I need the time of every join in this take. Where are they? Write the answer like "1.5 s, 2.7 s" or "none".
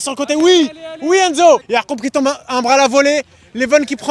1.7 s